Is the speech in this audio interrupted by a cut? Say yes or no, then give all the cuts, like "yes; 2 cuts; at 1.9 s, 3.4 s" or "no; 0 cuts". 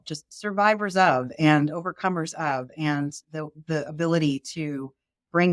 no; 0 cuts